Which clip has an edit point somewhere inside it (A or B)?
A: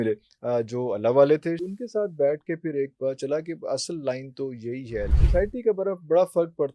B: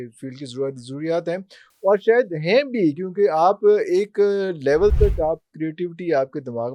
A